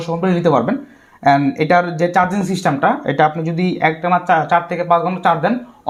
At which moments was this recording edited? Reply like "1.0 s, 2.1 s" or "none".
none